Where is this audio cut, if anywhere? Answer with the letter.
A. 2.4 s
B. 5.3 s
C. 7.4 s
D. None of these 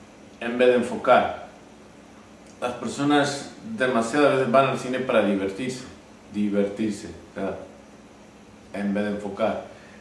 D